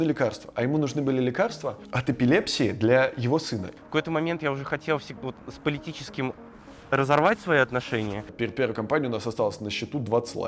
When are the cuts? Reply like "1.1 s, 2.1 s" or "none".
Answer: 1.9 s, 3.7 s, 8.2 s